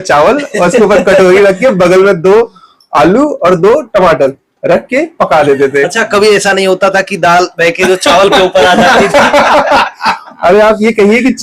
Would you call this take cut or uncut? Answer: uncut